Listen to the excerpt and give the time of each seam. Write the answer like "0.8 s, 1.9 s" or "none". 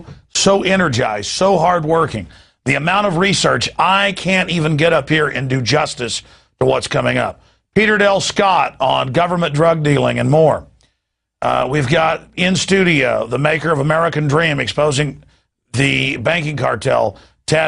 14.7 s

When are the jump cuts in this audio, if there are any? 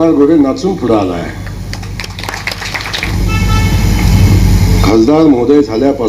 3.0 s

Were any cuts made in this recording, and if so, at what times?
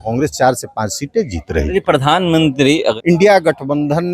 2.9 s

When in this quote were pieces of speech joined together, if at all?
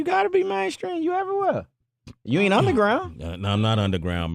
2.8 s

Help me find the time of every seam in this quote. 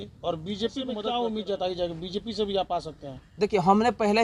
0.9 s

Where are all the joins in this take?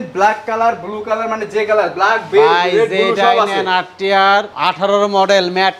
4.5 s

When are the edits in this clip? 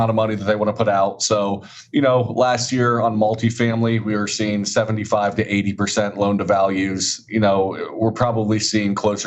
none

